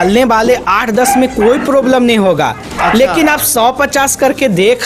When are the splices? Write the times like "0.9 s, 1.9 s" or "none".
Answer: none